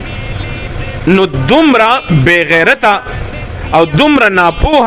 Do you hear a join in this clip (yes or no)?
no